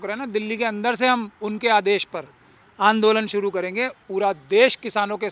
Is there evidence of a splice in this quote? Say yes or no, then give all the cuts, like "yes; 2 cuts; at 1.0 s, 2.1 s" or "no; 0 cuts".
yes; 1 cut; at 4.0 s